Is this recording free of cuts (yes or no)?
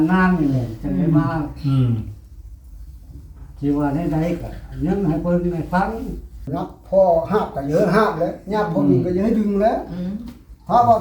no